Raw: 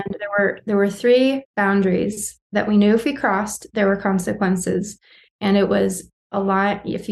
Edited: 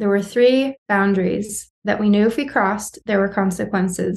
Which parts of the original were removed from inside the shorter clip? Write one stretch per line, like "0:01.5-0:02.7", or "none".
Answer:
none